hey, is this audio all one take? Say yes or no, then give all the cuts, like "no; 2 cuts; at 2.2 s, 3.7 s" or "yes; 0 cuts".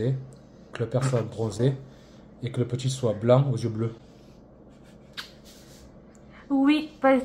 yes; 0 cuts